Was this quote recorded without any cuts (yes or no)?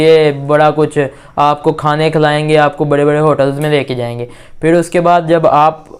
yes